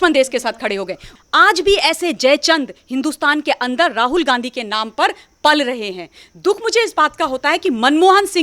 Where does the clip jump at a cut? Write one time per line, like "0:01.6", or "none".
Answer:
0:01.1